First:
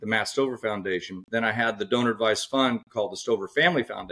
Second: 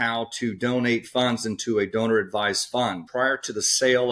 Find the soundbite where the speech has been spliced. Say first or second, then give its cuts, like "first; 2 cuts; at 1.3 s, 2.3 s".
second; 1 cut; at 3.0 s